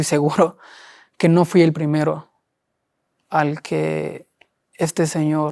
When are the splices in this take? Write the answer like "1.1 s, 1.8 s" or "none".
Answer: none